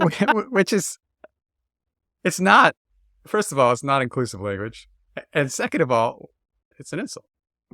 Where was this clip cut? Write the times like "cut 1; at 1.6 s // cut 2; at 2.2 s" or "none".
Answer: cut 1; at 6.7 s